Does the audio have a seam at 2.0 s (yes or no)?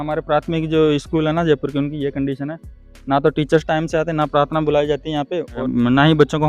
no